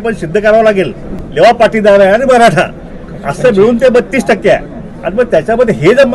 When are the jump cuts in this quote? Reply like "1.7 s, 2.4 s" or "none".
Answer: 1.2 s